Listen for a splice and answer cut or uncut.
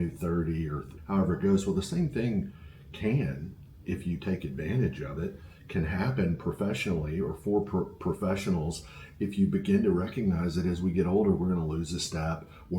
cut